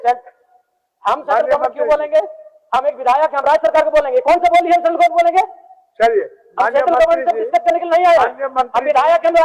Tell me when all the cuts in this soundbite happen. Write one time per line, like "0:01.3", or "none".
none